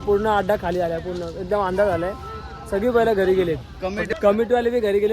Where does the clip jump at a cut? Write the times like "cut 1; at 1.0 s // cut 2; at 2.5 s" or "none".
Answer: cut 1; at 4.0 s